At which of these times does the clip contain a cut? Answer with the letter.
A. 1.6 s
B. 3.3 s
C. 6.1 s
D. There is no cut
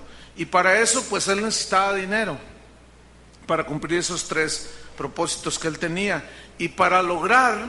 D